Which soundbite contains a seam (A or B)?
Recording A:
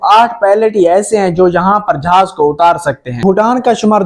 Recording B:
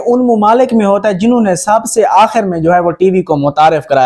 A